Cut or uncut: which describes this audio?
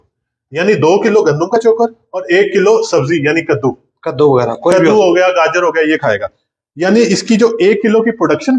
uncut